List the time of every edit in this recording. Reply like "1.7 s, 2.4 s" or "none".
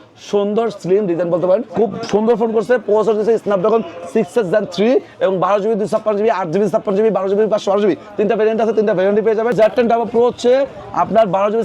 1.7 s, 9.5 s